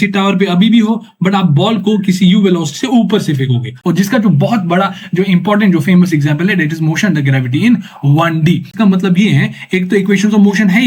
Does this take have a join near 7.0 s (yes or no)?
no